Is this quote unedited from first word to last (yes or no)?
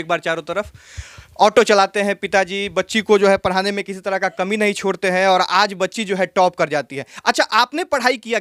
yes